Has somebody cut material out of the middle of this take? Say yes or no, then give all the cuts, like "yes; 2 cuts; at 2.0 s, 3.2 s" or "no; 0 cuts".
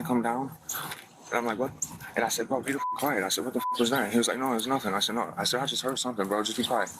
no; 0 cuts